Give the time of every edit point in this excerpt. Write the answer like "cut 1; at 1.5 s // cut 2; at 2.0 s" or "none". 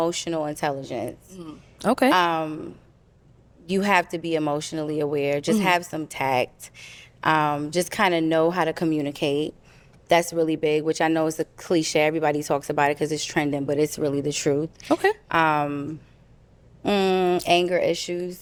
none